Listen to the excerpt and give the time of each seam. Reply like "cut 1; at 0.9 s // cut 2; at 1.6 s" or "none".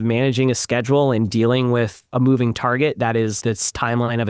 cut 1; at 2.0 s // cut 2; at 3.4 s